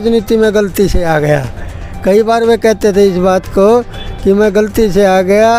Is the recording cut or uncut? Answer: uncut